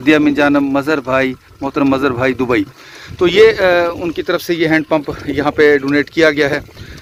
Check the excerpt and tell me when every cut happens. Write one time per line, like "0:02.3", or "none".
none